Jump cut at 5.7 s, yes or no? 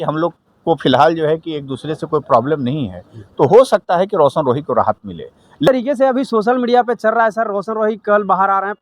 yes